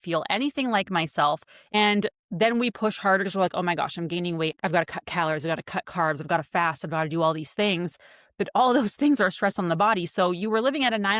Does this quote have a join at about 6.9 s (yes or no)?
no